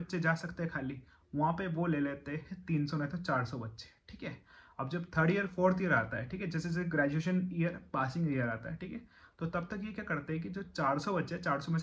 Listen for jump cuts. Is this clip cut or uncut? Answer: uncut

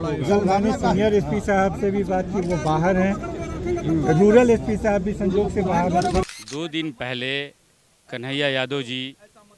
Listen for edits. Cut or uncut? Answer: cut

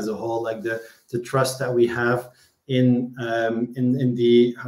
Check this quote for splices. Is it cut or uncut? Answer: uncut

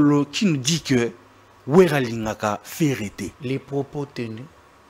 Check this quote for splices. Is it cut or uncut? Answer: cut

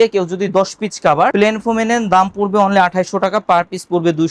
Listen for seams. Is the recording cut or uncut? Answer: uncut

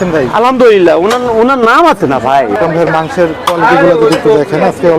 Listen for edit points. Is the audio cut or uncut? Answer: cut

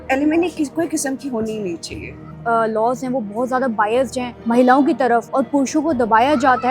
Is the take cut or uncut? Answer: cut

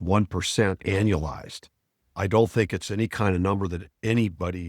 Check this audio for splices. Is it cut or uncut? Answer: cut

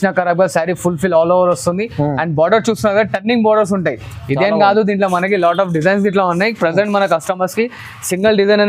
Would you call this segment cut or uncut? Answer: uncut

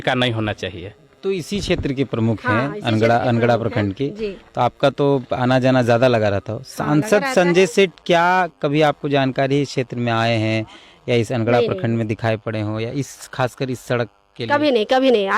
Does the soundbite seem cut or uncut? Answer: cut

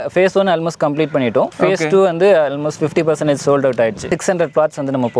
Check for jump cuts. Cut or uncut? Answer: cut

